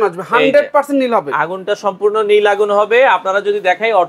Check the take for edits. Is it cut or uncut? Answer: uncut